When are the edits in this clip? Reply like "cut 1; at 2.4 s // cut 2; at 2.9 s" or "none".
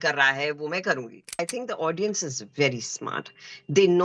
cut 1; at 1.4 s